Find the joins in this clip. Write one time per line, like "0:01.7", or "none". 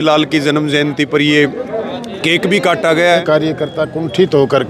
0:03.1

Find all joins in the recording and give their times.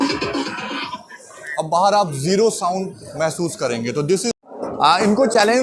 0:04.3

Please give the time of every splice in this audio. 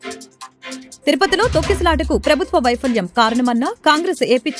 none

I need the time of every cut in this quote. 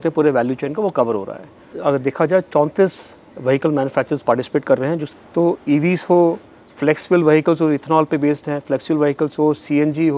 0:01.7
0:05.0

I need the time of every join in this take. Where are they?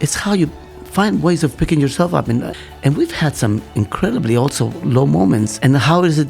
0:02.5
0:05.5

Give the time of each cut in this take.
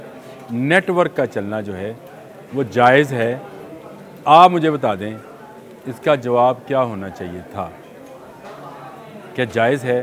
none

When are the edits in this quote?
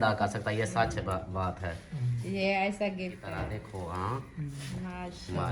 0:03.4

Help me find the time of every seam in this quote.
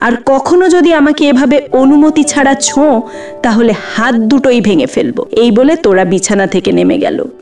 0:05.2

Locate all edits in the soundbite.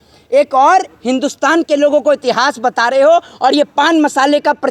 none

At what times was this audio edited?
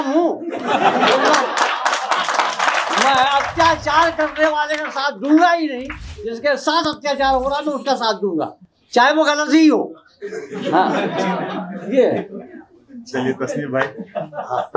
none

